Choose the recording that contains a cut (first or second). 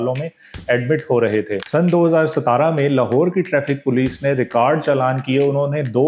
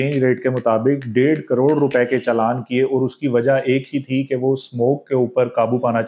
first